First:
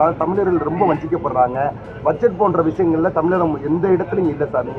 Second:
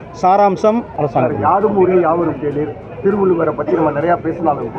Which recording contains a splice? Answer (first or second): second